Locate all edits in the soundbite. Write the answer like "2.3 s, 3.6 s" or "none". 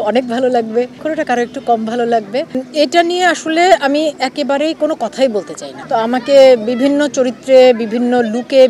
1.0 s, 2.5 s, 5.6 s